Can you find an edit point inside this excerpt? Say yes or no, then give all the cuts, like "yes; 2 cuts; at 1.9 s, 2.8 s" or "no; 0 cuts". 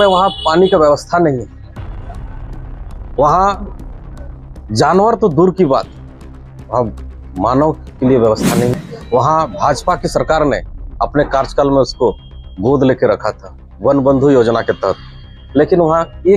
yes; 1 cut; at 8.9 s